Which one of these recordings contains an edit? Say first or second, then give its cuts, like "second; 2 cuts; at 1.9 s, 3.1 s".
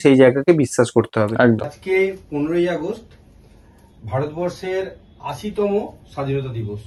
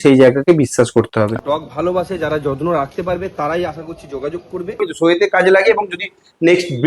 second; 2 cuts; at 1.3 s, 4.9 s